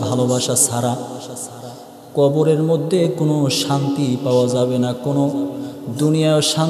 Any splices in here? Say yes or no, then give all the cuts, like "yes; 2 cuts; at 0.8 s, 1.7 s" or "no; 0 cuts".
no; 0 cuts